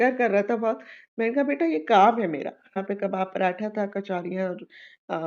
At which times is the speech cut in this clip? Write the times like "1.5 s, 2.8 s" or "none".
2.8 s